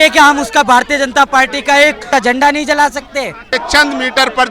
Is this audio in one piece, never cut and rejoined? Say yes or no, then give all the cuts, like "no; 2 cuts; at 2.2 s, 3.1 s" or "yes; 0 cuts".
no; 2 cuts; at 2.0 s, 3.5 s